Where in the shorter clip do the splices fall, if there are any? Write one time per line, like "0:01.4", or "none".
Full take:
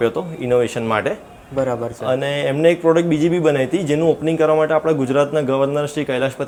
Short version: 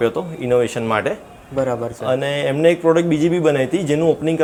none